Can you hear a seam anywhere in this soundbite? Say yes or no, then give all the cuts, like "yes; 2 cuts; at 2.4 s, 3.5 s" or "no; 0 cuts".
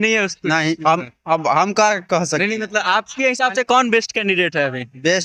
no; 0 cuts